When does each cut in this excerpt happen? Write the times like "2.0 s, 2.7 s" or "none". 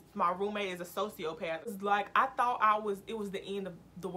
1.7 s